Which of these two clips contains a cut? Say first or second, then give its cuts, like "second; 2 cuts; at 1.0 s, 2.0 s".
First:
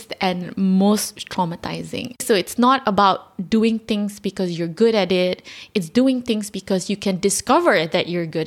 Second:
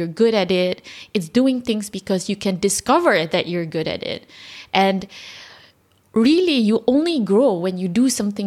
first; 1 cut; at 2.2 s